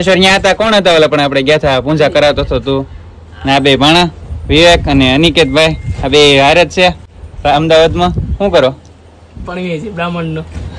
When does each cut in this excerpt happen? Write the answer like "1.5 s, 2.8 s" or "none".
none